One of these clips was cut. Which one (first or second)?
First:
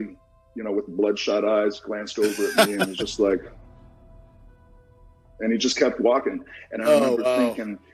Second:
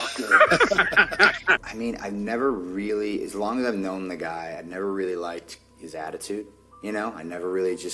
second